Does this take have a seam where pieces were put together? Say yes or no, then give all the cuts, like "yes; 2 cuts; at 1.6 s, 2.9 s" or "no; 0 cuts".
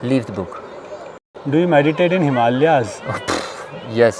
yes; 1 cut; at 1.2 s